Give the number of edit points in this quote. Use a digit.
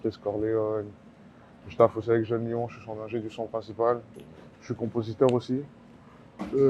0